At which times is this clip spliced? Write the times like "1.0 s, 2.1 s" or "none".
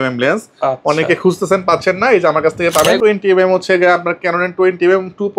3.0 s